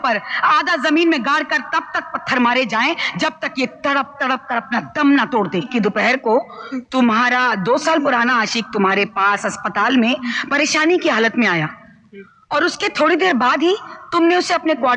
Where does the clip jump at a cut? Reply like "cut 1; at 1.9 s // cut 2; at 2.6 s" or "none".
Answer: cut 1; at 5.7 s